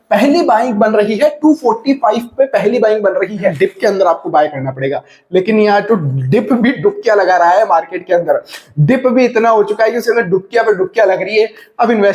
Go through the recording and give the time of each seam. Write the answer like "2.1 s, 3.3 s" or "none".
3.5 s